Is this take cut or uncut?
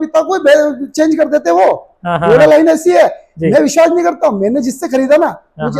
uncut